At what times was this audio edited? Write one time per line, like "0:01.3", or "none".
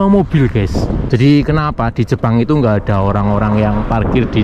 0:01.0